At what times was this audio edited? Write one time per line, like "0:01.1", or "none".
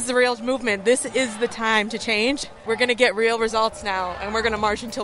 0:02.4